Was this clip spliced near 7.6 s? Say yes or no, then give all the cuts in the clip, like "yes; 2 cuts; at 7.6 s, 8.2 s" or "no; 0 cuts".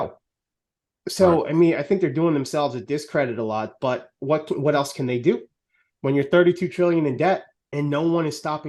yes; 1 cut; at 7.6 s